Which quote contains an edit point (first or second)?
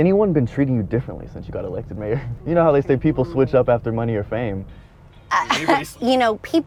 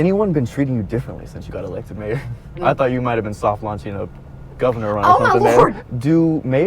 second